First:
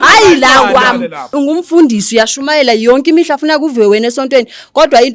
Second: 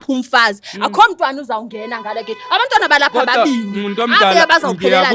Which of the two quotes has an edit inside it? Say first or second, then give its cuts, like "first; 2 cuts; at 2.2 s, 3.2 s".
first; 1 cut; at 1.3 s